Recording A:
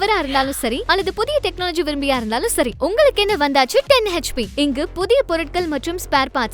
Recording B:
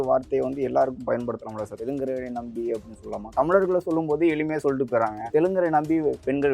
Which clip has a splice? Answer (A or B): B